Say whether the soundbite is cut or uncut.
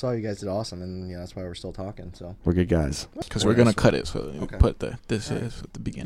cut